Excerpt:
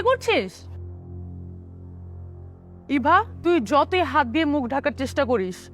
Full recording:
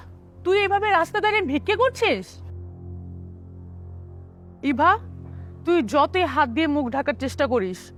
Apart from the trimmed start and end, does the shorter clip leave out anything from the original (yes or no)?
yes